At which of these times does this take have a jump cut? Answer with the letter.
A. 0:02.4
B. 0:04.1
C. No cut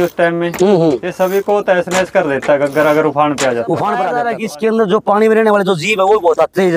B